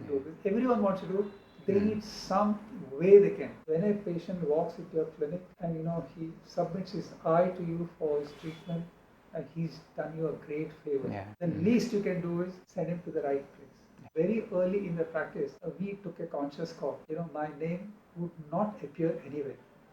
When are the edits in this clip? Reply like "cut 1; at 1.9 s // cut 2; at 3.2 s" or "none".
cut 1; at 3.5 s // cut 2; at 5.5 s // cut 3; at 11.3 s // cut 4; at 12.6 s // cut 5; at 14.0 s // cut 6; at 15.6 s // cut 7; at 17.0 s